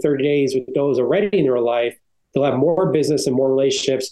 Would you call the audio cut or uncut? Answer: uncut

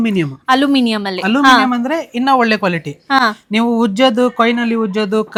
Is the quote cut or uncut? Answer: uncut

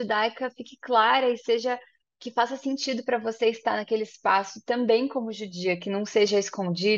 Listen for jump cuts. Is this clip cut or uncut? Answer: uncut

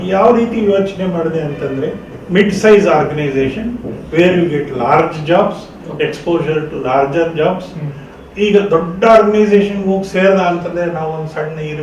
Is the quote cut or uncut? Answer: uncut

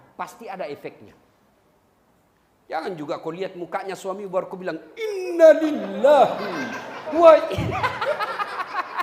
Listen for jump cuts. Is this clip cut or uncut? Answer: uncut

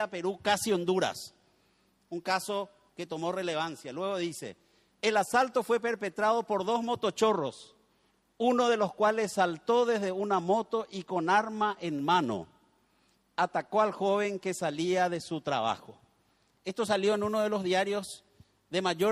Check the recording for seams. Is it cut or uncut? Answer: uncut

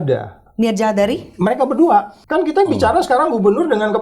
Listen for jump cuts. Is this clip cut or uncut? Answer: cut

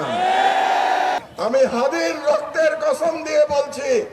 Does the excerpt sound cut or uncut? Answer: cut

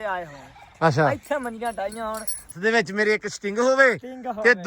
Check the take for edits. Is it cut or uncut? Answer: cut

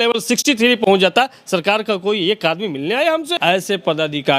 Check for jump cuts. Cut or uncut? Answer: cut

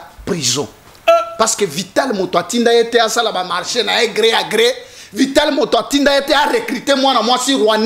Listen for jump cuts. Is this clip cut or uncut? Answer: uncut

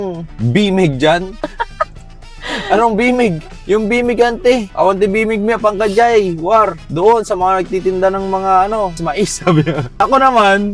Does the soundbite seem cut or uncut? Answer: cut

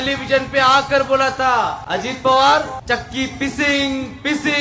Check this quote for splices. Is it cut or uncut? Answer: cut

